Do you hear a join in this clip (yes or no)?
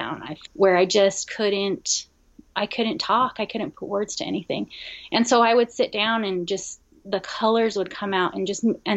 no